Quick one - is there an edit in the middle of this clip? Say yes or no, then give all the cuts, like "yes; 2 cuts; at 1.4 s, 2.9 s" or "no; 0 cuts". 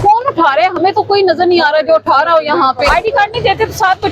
yes; 1 cut; at 2.9 s